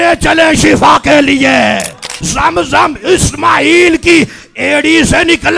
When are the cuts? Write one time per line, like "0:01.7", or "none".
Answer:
0:02.2